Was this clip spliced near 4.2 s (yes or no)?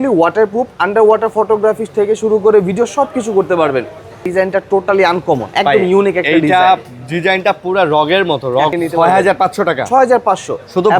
yes